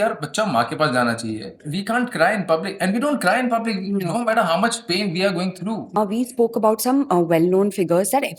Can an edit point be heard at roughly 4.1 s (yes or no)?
no